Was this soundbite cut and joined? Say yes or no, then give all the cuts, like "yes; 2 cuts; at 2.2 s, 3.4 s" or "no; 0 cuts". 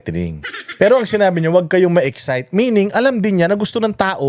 no; 0 cuts